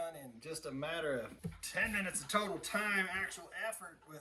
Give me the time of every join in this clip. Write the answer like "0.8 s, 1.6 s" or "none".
1.3 s